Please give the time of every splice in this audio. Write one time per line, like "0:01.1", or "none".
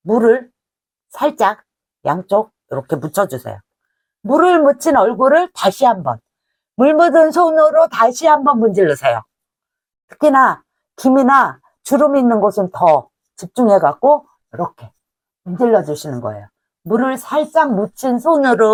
none